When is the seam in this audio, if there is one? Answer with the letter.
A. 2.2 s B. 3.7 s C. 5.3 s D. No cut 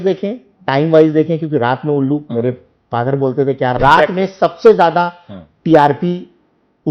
B